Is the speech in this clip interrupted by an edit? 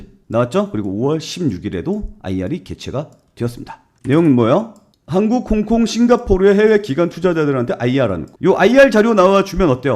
yes; 2 cuts; at 4.8 s, 8.3 s

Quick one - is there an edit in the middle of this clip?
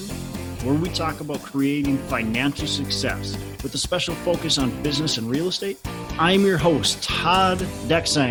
no; 0 cuts

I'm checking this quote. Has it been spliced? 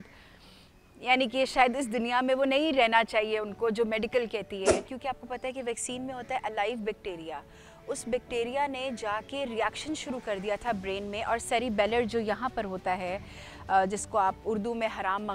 yes; 1 cut; at 4.9 s

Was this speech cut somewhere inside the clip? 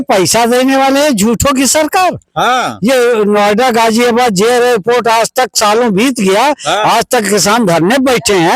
no; 0 cuts

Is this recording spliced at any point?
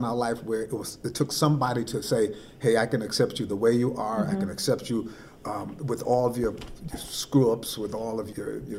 no; 0 cuts

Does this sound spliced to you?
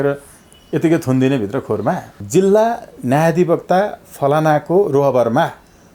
yes; 1 cut; at 2.1 s

